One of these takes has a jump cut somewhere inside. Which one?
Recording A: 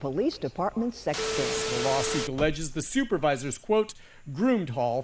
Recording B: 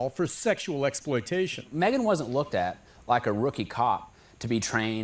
A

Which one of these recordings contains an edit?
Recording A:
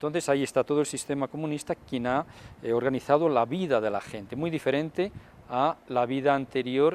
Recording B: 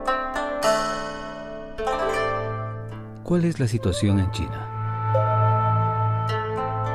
A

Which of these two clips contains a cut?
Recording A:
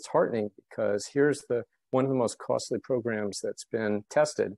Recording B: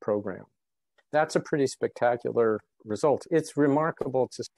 B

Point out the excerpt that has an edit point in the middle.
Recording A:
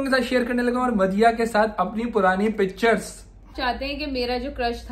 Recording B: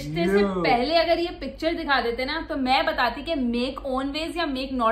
A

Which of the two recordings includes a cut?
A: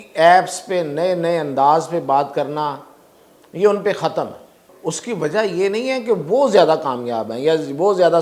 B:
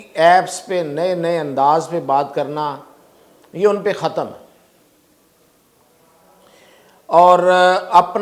A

